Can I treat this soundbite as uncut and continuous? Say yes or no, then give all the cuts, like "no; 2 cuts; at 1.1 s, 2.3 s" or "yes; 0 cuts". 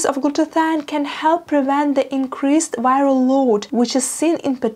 no; 1 cut; at 3.7 s